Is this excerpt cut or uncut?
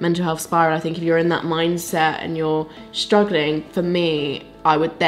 uncut